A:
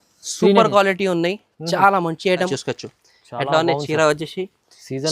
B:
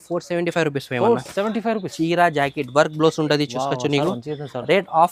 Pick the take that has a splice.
A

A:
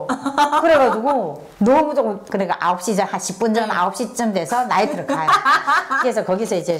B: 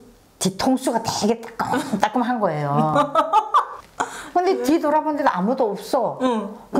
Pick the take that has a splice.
A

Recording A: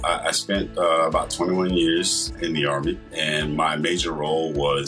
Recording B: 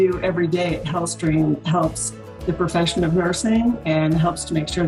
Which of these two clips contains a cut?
A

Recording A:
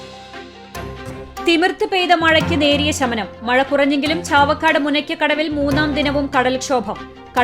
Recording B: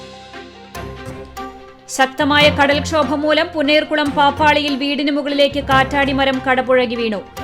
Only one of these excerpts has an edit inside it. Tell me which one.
A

